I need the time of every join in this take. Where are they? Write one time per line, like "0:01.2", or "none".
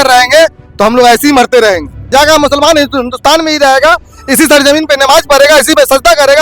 0:01.9

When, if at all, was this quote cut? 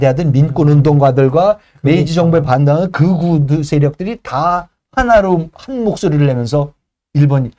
none

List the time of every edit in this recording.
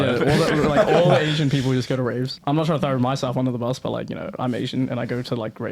0:02.3

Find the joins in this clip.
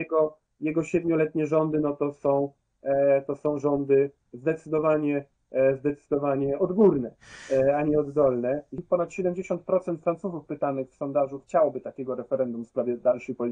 0:08.8

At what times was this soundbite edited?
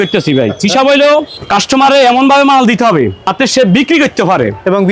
0:01.4
0:03.2

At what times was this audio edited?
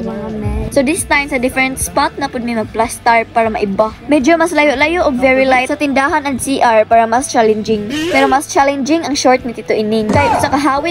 none

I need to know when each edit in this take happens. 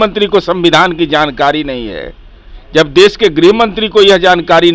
none

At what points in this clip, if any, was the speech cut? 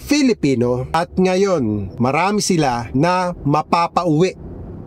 0:00.9
0:01.9
0:02.8

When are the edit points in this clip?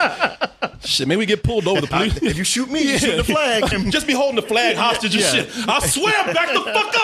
0:03.7

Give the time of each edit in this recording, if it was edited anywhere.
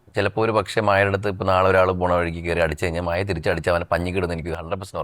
none

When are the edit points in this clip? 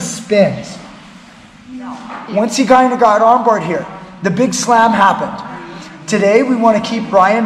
0:02.2

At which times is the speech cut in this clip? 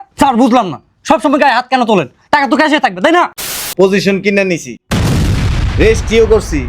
0:03.4

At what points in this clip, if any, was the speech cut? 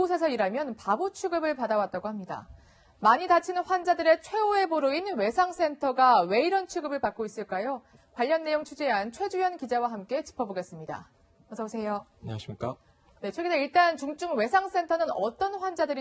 none

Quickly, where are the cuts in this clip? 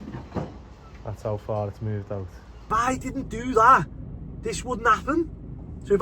0:02.7

